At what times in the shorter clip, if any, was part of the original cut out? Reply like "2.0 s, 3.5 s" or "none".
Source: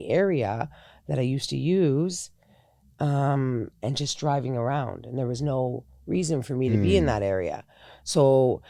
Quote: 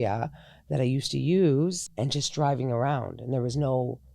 1.9 s